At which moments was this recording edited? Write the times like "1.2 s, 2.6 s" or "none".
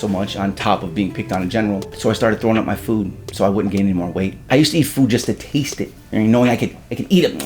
none